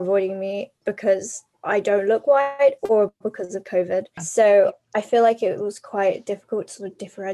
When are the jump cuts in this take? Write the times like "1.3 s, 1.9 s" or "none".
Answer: 4.2 s